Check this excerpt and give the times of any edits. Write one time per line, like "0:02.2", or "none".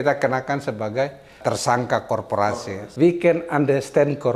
0:02.5